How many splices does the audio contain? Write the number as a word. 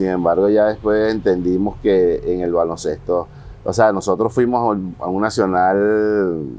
zero